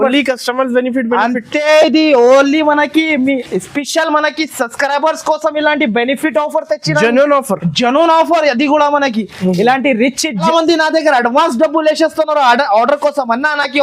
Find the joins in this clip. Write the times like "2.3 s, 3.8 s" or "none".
10.4 s